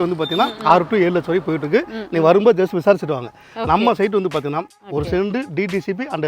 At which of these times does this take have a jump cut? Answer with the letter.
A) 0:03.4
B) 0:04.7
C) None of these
B